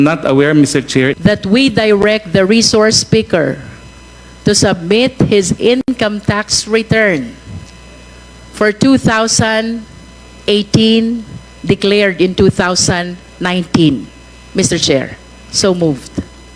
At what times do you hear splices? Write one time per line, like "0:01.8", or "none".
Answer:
0:01.1